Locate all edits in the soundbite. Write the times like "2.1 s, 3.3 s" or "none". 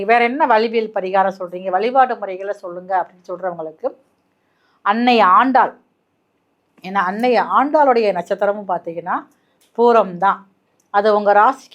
none